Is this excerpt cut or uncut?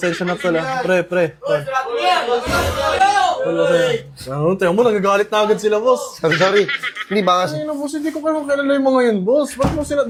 uncut